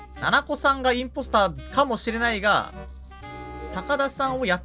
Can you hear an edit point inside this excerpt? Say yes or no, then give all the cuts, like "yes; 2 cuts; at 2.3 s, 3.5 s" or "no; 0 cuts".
no; 0 cuts